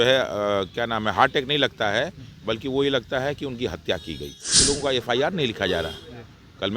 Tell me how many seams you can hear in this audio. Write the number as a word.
one